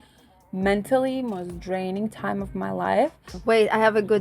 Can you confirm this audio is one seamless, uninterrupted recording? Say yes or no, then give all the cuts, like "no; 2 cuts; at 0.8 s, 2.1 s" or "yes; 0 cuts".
no; 1 cut; at 3.3 s